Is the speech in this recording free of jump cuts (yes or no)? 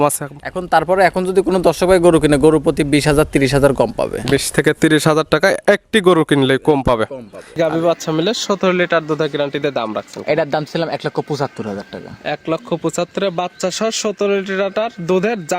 no